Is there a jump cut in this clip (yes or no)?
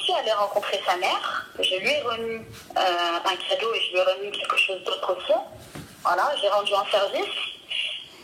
no